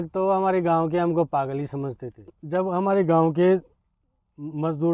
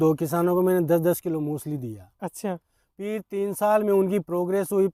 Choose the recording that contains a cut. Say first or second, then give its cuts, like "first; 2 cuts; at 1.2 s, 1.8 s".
first; 1 cut; at 2.3 s